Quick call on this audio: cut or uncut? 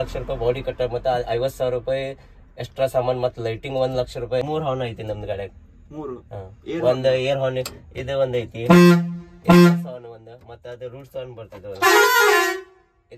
cut